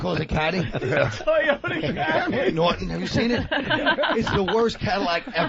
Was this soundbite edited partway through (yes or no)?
no